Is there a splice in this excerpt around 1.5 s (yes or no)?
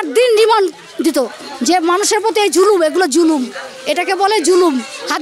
no